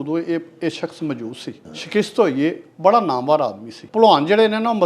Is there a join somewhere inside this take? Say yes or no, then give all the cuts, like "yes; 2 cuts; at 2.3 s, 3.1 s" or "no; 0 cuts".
yes; 2 cuts; at 1.7 s, 3.8 s